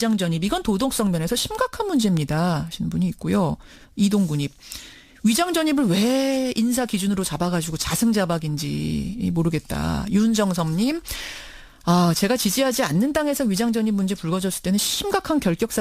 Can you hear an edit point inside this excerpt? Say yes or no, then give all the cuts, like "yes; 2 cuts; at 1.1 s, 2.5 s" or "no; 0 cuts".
yes; 1 cut; at 12.2 s